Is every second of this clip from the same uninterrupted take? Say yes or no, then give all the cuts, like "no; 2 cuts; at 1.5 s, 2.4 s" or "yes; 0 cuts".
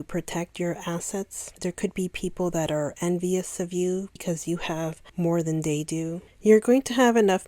no; 3 cuts; at 1.4 s, 4.4 s, 6.3 s